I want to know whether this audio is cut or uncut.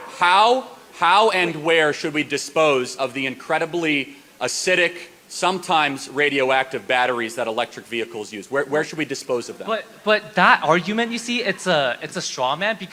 uncut